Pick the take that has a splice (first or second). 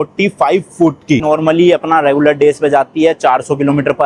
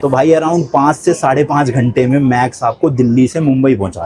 first